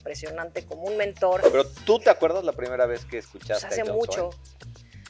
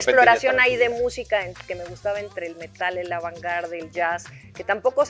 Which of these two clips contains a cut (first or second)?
first